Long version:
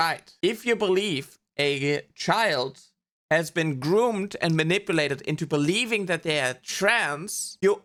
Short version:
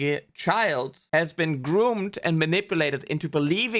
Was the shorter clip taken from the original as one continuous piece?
no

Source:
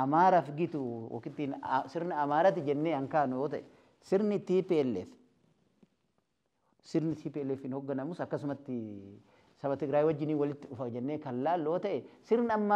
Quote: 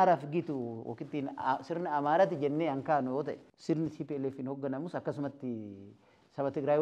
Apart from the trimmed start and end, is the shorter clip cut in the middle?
yes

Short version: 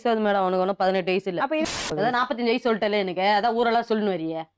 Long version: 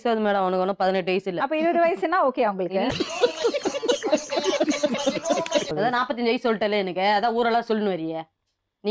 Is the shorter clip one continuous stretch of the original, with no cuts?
no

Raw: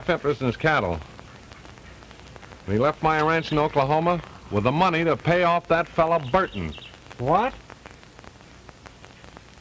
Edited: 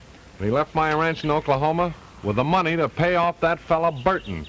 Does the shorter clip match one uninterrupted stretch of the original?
yes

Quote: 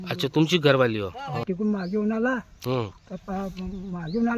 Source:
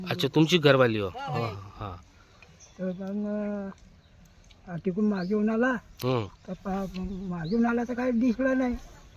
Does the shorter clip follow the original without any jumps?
no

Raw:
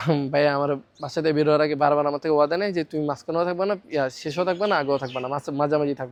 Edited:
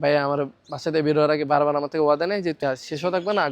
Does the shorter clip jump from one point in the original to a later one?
yes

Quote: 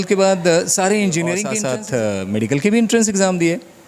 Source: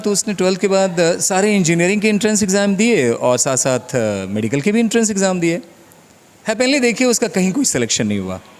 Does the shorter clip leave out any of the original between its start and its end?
yes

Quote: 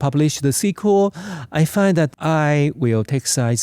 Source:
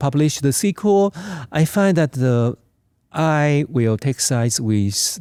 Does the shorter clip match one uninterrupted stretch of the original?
no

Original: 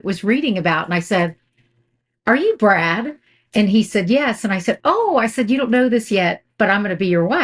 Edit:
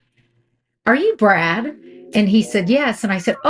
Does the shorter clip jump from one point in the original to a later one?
no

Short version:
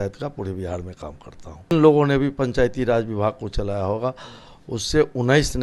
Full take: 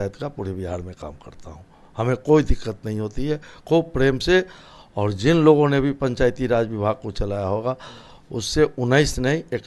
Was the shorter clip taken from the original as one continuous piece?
no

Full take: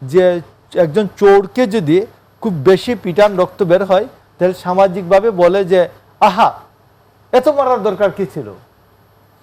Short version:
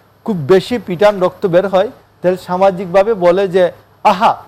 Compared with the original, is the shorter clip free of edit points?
yes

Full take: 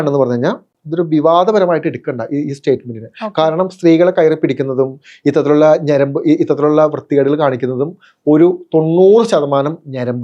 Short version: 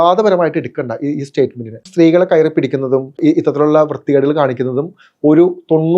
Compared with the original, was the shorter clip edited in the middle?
yes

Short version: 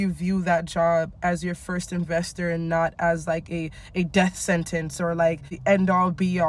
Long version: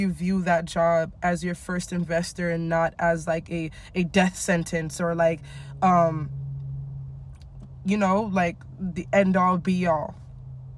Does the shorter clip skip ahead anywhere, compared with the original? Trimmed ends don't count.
yes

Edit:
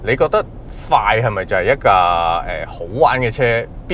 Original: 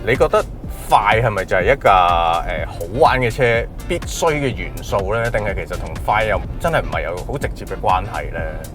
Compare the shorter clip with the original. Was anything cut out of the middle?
no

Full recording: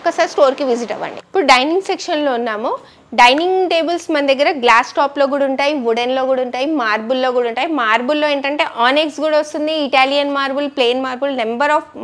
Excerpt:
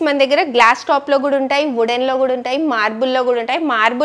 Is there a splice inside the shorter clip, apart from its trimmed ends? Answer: no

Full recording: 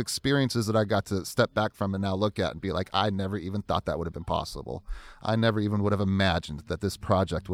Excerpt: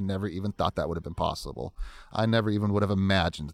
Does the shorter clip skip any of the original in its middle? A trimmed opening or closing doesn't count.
no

